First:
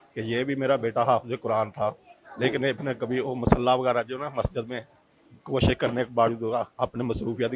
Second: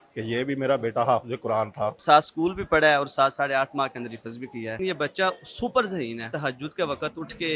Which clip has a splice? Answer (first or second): second